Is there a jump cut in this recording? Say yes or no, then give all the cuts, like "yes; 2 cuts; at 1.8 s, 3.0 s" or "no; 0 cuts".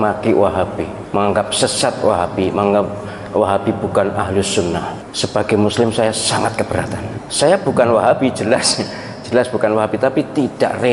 no; 0 cuts